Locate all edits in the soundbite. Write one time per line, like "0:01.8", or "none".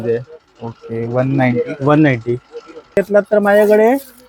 0:03.0